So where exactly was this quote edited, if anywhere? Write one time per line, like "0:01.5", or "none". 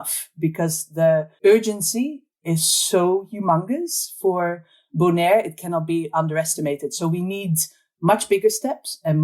0:01.3